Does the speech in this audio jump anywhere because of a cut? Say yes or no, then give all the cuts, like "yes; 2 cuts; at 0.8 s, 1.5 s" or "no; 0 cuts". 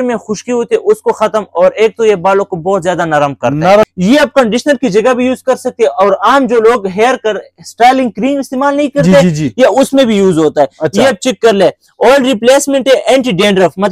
yes; 1 cut; at 3.8 s